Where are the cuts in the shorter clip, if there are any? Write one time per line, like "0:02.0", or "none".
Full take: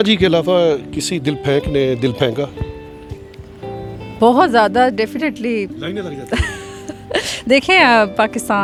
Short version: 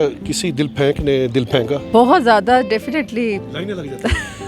0:01.8